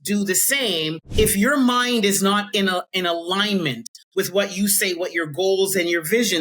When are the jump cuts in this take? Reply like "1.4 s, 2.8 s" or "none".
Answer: 1.1 s